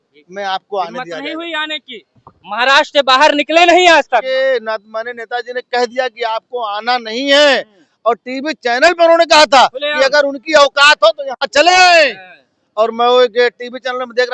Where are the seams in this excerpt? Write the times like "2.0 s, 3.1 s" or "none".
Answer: 4.3 s